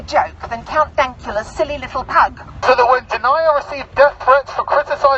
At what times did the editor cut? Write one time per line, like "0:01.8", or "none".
0:02.5